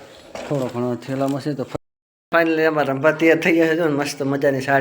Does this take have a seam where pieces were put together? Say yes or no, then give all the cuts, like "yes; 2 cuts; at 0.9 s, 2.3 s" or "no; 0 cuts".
yes; 1 cut; at 1.7 s